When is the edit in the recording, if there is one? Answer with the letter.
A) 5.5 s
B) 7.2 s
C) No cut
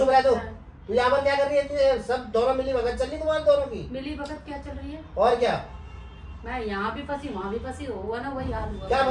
C